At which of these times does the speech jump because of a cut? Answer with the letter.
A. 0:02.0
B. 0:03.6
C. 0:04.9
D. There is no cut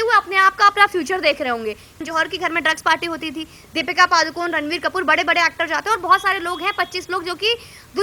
A